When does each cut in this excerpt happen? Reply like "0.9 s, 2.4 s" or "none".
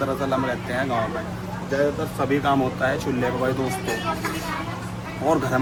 none